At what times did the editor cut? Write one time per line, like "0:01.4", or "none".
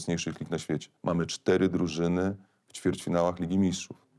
0:00.9